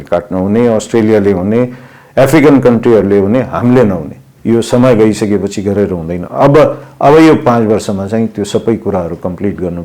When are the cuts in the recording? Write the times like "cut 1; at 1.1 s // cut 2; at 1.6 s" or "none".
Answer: cut 1; at 4.3 s